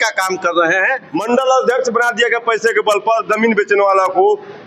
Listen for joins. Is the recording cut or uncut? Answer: cut